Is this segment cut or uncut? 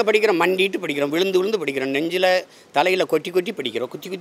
uncut